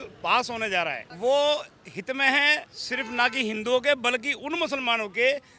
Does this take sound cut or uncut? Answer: cut